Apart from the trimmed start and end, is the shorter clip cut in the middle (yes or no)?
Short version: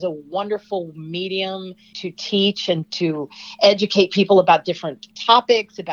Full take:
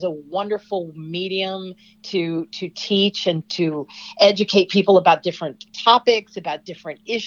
yes